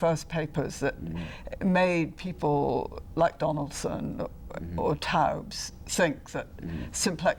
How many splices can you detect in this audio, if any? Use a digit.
0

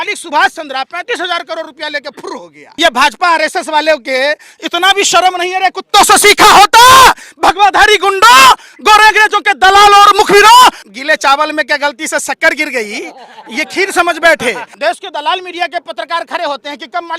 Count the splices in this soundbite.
3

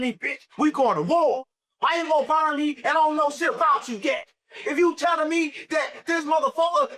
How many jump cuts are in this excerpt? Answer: 0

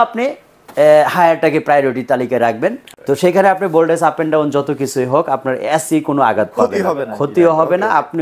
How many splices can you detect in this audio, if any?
1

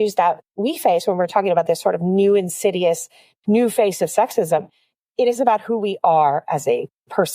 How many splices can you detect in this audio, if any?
0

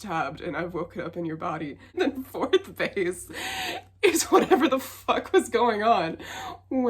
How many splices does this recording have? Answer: 1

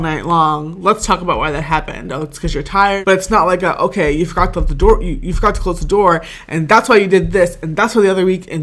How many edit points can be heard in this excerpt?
1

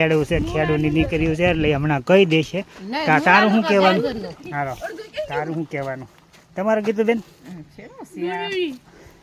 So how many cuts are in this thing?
0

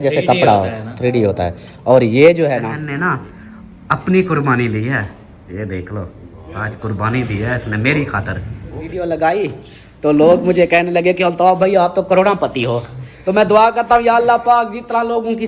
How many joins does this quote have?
2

